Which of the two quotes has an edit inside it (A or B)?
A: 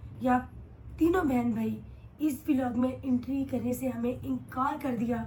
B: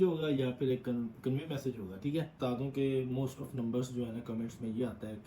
B